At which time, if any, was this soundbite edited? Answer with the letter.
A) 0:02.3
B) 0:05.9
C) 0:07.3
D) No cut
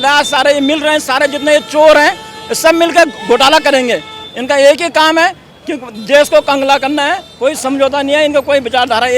C